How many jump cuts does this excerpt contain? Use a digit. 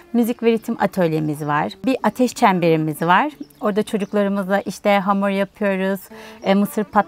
0